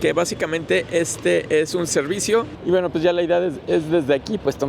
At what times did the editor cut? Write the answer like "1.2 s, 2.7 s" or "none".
2.5 s